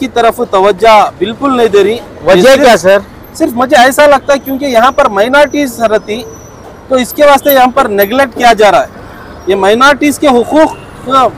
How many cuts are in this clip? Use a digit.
0